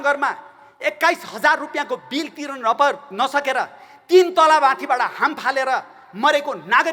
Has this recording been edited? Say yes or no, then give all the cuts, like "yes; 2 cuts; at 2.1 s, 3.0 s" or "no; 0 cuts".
no; 0 cuts